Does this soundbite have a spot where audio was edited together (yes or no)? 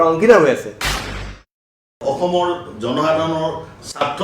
yes